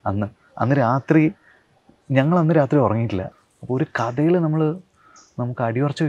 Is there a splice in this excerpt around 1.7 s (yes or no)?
no